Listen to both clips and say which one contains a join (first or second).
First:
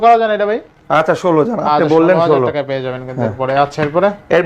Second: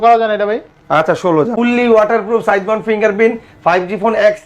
second